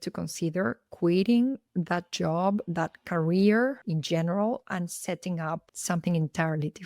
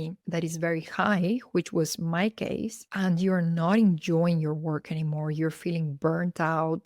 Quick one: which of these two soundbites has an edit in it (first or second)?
first